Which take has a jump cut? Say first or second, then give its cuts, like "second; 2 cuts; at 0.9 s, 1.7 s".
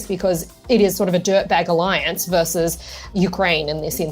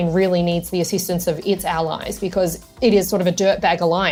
first; 1 cut; at 3.1 s